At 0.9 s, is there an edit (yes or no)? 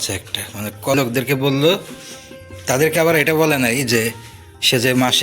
yes